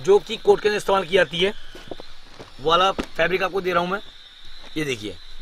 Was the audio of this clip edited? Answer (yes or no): no